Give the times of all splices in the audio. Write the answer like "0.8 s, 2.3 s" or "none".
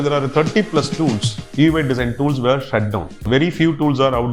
none